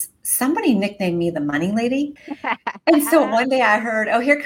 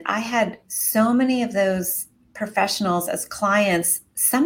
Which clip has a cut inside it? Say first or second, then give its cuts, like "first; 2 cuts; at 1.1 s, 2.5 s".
first; 1 cut; at 2.3 s